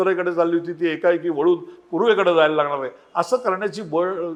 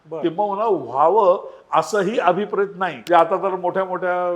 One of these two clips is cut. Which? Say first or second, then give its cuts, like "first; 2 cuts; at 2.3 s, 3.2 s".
second; 1 cut; at 2.9 s